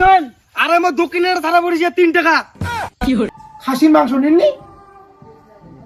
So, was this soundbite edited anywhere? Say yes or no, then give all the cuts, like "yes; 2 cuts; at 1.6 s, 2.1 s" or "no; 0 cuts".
yes; 1 cut; at 3.3 s